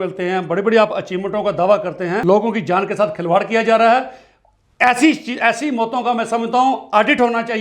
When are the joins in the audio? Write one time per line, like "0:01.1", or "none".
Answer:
0:02.2